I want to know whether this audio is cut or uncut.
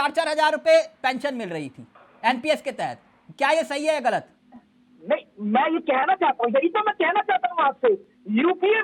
uncut